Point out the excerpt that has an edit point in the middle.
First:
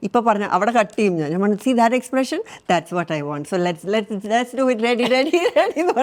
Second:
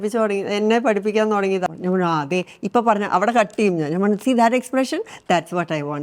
second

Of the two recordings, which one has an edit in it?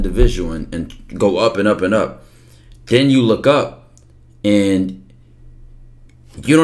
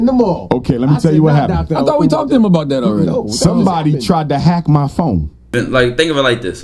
second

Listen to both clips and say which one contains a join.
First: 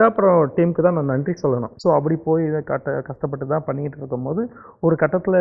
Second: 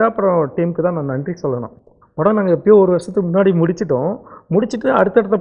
first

